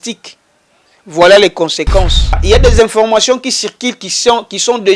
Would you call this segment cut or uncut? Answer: cut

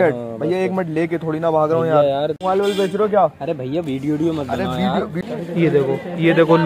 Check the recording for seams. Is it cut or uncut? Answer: cut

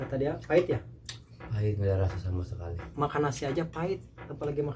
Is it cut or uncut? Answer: uncut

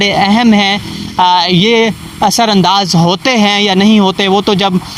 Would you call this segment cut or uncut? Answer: uncut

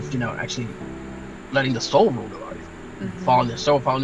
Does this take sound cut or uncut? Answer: uncut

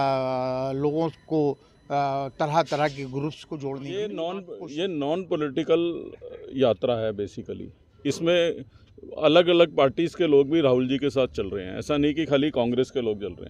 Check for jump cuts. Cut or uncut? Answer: cut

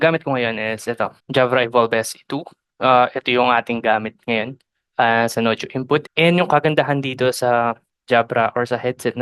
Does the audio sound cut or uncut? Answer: cut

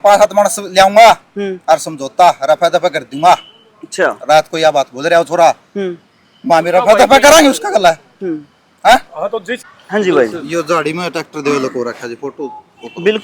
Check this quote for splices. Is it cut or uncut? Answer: cut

